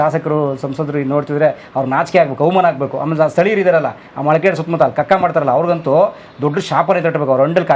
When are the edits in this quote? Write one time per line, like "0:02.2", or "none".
none